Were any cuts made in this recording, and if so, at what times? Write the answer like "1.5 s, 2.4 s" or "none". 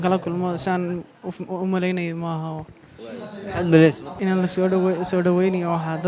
none